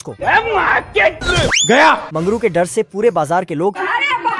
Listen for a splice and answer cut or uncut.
uncut